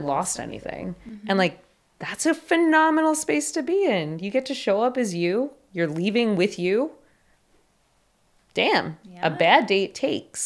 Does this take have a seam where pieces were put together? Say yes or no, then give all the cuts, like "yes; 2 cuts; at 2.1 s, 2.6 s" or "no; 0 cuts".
no; 0 cuts